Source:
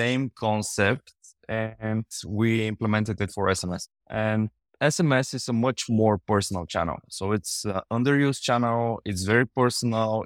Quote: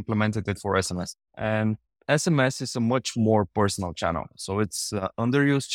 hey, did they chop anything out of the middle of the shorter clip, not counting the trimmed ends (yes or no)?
no